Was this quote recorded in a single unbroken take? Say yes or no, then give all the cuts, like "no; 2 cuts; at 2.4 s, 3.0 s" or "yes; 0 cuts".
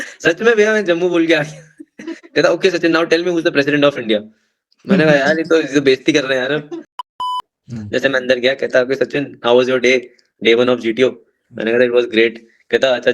no; 1 cut; at 7.2 s